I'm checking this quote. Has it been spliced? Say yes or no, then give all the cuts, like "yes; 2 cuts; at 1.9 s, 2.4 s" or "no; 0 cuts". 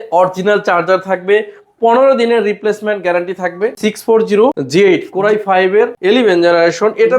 yes; 2 cuts; at 4.1 s, 6.0 s